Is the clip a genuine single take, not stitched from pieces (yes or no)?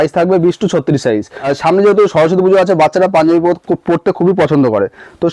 no